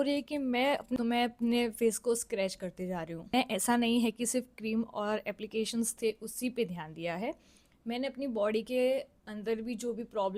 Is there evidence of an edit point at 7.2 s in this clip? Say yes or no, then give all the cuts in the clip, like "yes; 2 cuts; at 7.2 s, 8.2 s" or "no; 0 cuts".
no; 2 cuts; at 1.0 s, 3.3 s